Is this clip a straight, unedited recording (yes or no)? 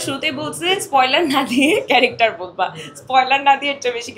yes